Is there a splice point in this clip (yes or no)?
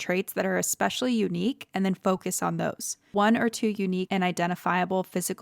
yes